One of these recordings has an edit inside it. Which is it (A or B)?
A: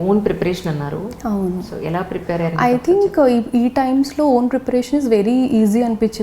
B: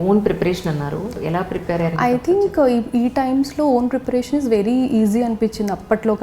B